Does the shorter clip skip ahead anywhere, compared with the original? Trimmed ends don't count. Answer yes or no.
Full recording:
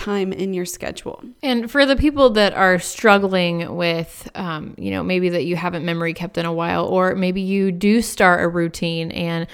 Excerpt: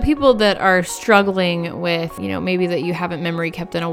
yes